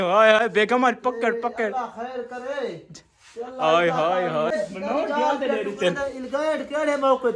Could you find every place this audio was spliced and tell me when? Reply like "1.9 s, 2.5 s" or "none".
4.5 s